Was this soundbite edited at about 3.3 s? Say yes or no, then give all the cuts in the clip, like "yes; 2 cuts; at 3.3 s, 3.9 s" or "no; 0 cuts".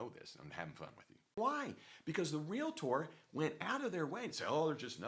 no; 1 cut; at 1.4 s